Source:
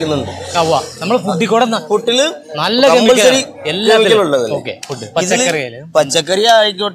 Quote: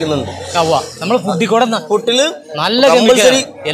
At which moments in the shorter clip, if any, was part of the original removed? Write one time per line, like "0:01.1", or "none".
none